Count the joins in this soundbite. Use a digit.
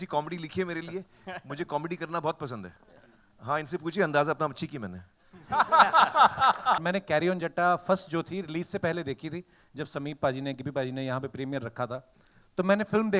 1